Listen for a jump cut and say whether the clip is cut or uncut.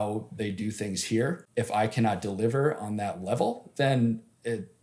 cut